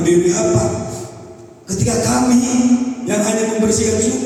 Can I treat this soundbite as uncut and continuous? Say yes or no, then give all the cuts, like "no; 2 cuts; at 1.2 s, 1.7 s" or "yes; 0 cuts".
yes; 0 cuts